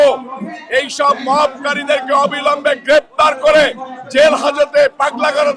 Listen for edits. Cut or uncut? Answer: uncut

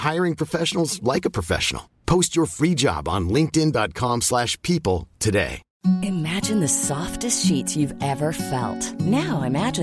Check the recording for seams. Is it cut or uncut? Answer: cut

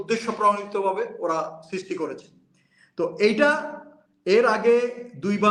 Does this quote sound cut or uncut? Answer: uncut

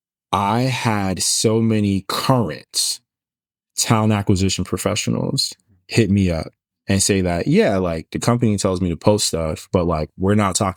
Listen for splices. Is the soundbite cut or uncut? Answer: uncut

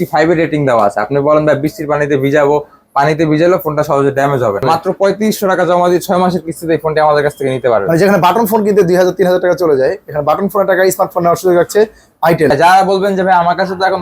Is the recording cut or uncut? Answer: cut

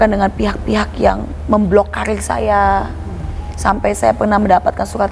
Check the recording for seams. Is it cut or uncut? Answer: uncut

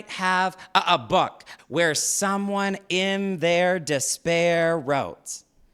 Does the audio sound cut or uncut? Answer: cut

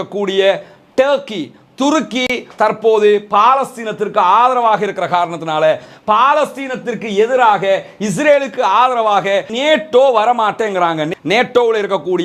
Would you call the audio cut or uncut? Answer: cut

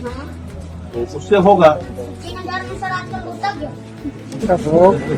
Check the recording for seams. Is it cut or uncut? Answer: uncut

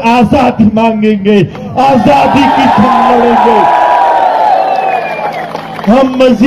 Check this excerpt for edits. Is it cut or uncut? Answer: uncut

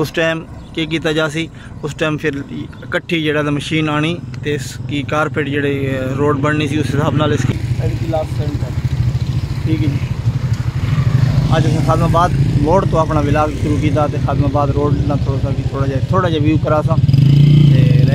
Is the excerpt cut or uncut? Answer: cut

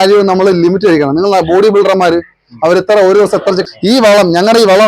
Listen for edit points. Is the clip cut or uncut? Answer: cut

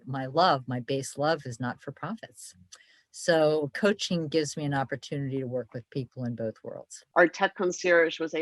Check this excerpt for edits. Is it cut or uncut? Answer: cut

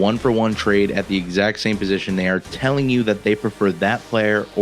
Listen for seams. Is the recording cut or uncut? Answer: uncut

